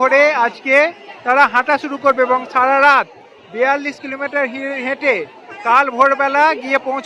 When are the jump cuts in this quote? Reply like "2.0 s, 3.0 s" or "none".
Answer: none